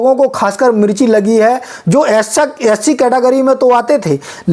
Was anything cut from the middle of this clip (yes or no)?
no